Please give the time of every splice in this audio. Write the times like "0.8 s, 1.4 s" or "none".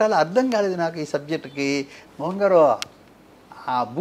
2.0 s

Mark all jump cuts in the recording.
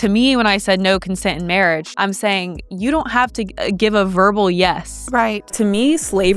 1.9 s, 3.5 s, 5.5 s

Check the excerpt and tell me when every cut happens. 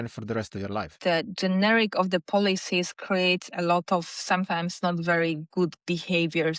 1.0 s

